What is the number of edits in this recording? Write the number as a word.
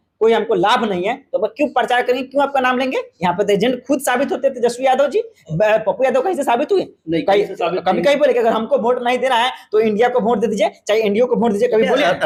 zero